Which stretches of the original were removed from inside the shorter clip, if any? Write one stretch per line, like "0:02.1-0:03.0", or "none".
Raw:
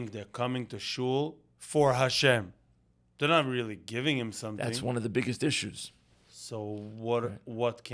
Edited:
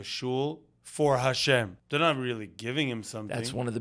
0:02.5-0:03.1

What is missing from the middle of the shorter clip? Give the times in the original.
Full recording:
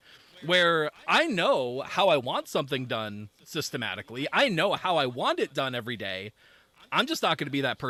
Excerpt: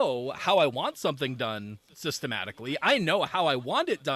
none

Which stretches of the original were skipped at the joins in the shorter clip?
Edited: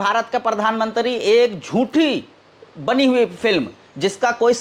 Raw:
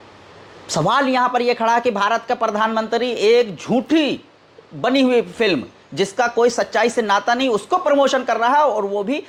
none

